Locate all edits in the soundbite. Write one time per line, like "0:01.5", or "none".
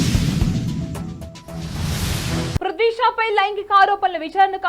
0:02.4

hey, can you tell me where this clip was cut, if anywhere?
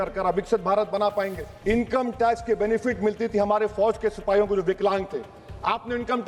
0:01.5

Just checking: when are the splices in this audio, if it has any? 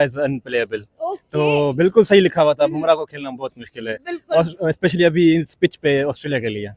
none

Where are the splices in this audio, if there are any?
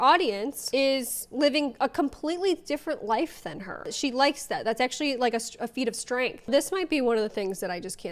0:06.4

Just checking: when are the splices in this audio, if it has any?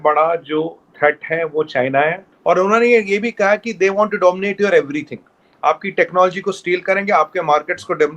0:02.3

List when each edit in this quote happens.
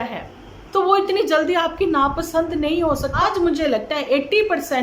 0:03.2

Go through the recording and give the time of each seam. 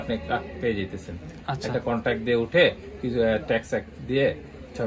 none

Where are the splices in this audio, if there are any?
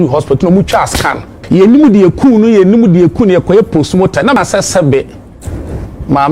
0:01.4
0:04.4

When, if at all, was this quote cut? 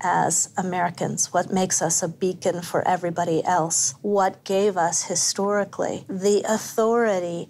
0:04.4
0:06.1

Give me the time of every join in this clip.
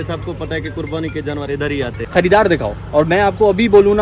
0:01.9

